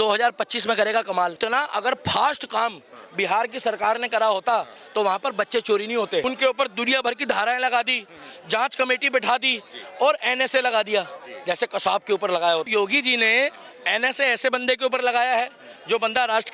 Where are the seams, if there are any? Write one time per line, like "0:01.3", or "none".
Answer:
0:01.4
0:06.2
0:12.7